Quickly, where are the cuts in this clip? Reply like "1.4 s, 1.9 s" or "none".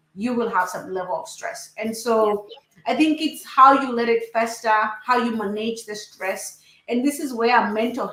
none